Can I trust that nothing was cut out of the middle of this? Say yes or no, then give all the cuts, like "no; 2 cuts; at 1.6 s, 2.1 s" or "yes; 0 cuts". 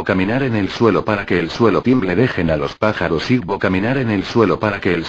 yes; 0 cuts